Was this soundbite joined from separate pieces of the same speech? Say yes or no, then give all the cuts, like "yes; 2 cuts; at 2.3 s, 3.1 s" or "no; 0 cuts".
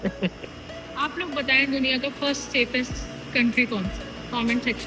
no; 0 cuts